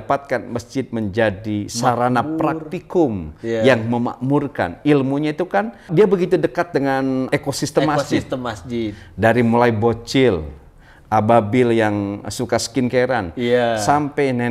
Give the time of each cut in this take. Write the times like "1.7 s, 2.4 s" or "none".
5.9 s, 7.3 s